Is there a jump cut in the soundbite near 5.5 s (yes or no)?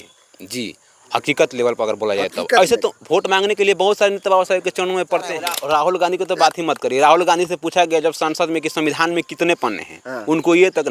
yes